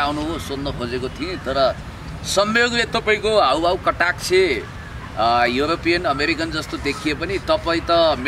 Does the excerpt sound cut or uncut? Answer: uncut